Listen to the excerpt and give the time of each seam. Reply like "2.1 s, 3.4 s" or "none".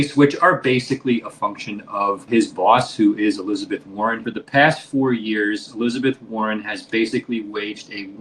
2.2 s, 4.3 s